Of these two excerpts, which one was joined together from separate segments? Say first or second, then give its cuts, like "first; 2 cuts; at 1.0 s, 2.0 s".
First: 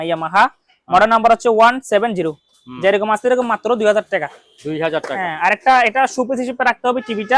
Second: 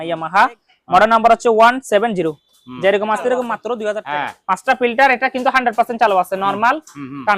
second; 1 cut; at 4.1 s